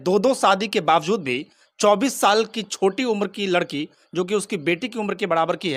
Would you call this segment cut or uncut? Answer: uncut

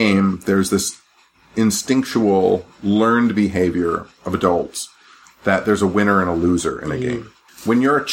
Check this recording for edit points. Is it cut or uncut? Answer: uncut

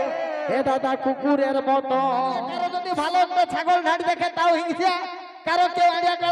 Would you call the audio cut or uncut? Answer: cut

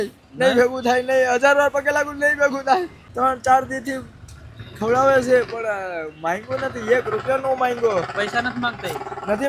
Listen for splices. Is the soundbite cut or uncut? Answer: cut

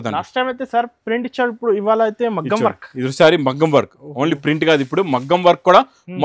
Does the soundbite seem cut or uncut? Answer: uncut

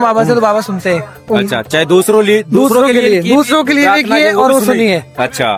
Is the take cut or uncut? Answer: uncut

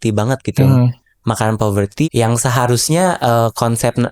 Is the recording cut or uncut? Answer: cut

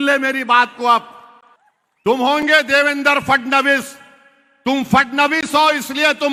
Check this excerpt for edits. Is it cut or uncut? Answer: uncut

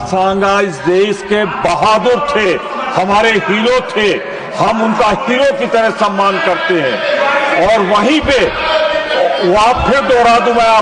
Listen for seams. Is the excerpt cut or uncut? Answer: uncut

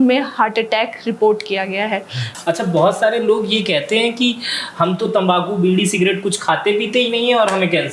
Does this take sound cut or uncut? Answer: cut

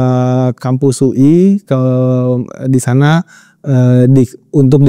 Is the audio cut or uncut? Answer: uncut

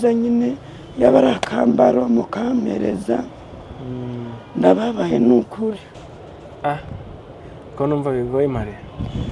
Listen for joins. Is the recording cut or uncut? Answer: cut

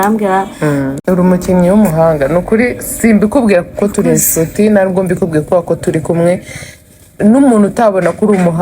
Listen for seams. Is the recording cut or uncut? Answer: cut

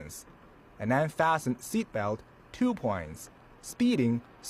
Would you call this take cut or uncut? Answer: cut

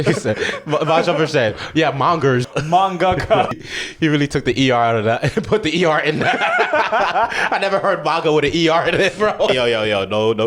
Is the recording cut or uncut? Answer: cut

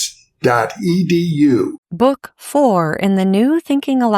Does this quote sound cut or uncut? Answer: cut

